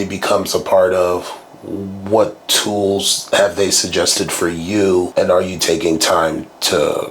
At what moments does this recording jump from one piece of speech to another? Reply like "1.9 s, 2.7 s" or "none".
5.1 s

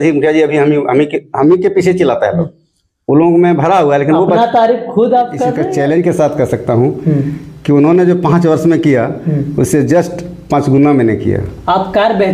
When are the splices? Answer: 5.6 s

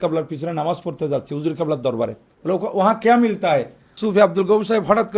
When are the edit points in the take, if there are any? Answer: 2.3 s, 4.0 s

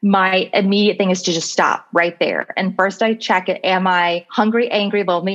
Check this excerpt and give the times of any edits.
4.2 s

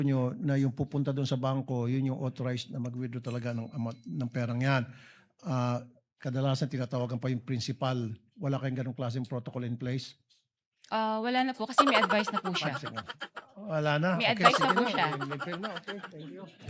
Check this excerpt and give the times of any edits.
none

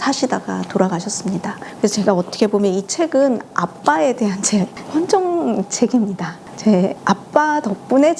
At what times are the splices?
1.7 s

